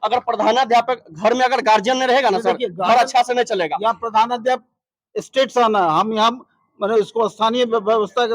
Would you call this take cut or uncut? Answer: uncut